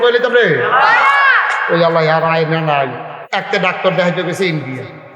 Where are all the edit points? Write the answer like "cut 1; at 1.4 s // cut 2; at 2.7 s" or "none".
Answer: cut 1; at 3.1 s

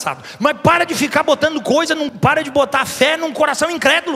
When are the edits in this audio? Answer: cut 1; at 2.1 s

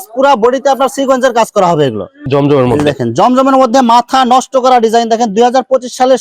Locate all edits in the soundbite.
cut 1; at 2.1 s

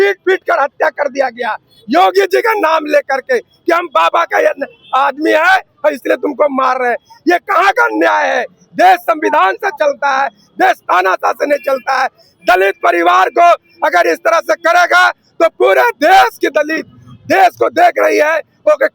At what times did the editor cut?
none

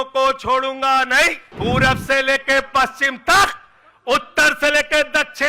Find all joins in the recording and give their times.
cut 1; at 1.4 s

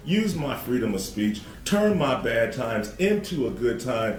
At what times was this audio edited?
none

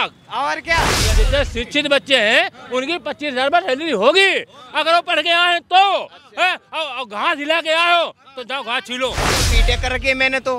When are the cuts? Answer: cut 1; at 1.0 s // cut 2; at 9.5 s

